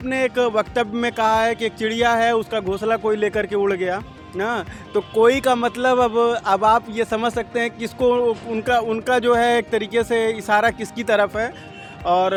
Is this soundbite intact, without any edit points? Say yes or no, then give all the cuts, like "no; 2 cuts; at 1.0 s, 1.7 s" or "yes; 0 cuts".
yes; 0 cuts